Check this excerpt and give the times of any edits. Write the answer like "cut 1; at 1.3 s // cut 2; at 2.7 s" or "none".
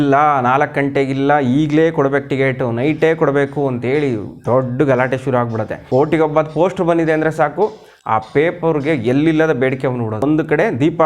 cut 1; at 5.7 s // cut 2; at 10.2 s